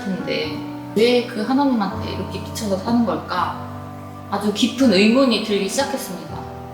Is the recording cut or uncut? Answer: cut